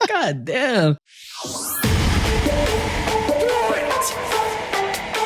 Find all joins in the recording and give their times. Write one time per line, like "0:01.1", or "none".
0:01.1